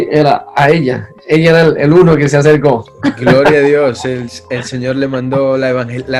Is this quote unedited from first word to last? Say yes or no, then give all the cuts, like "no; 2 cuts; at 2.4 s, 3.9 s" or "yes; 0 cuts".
yes; 0 cuts